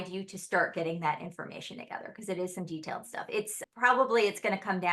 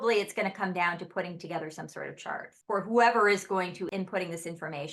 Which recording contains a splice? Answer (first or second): second